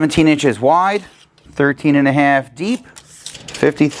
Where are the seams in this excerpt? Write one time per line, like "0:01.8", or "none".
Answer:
none